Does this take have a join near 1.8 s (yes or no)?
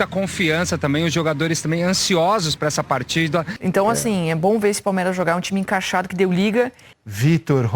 no